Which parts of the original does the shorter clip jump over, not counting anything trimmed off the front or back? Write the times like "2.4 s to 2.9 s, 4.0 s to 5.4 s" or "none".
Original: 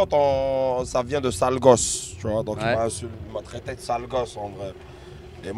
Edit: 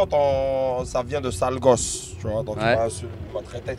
none